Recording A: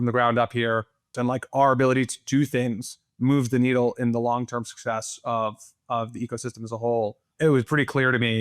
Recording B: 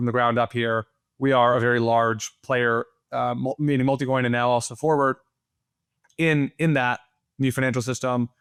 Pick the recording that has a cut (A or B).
A